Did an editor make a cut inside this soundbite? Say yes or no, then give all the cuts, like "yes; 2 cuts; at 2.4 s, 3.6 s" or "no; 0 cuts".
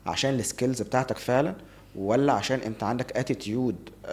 no; 0 cuts